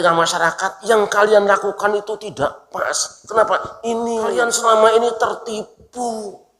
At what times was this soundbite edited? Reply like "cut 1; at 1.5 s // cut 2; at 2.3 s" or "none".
cut 1; at 4.3 s